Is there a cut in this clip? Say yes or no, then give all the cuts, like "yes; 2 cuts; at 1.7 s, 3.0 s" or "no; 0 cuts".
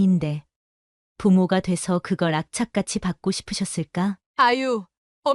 yes; 1 cut; at 4.2 s